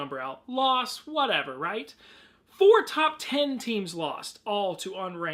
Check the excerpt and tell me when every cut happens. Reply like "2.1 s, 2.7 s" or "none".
none

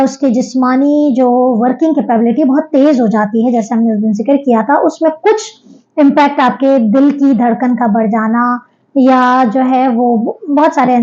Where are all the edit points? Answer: none

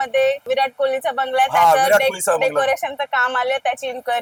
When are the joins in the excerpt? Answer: none

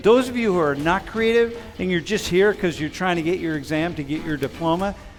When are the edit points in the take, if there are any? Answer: none

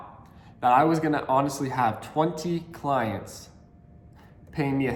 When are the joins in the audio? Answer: none

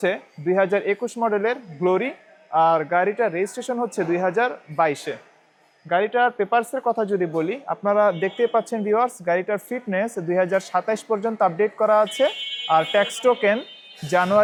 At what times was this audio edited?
none

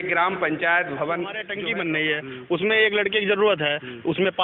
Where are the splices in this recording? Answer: 1.5 s

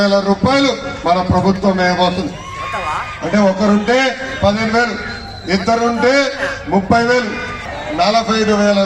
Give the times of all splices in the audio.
7.5 s

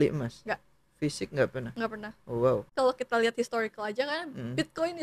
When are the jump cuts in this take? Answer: 2.7 s

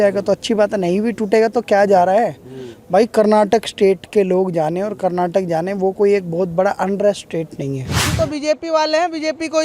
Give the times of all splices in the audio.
8.1 s

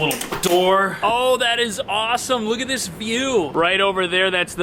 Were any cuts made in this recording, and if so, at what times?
0.9 s

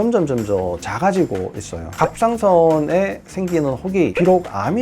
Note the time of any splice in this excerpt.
1.9 s

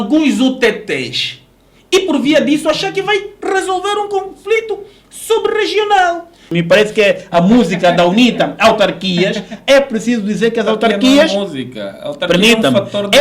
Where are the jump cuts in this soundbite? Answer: 6.5 s

